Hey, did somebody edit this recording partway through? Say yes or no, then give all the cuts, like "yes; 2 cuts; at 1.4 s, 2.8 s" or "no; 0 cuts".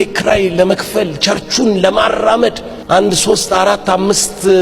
yes; 1 cut; at 2.7 s